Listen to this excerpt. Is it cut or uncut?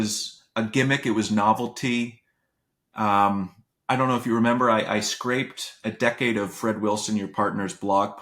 uncut